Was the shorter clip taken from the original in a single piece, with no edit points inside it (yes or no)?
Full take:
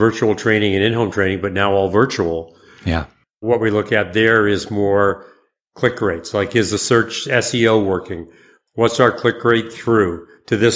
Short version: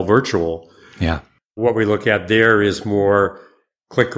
yes